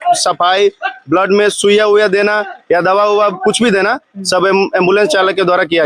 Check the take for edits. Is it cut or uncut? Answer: uncut